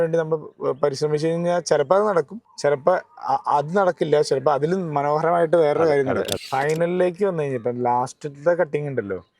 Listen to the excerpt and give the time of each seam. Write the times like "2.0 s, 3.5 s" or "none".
2.4 s, 6.4 s

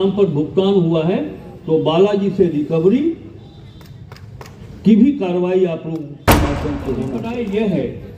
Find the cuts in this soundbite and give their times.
7.2 s

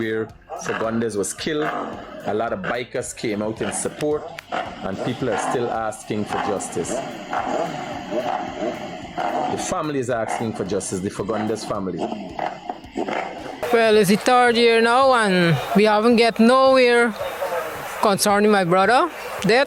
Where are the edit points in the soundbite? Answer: 13.6 s

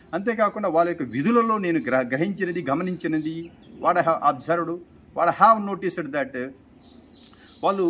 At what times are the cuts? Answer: none

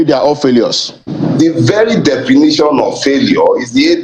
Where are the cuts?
1.0 s

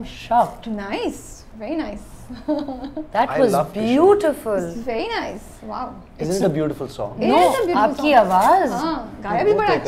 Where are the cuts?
none

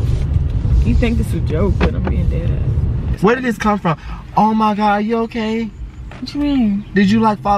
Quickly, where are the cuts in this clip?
3.1 s

